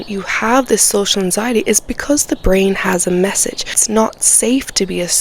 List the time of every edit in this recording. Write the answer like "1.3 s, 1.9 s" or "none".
3.7 s